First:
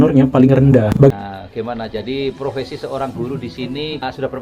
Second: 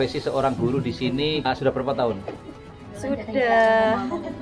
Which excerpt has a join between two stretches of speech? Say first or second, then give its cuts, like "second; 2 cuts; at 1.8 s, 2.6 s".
first; 1 cut; at 1.1 s